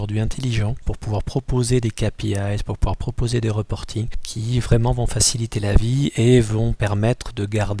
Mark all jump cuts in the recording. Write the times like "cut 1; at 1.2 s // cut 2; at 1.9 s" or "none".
cut 1; at 0.9 s // cut 2; at 4.2 s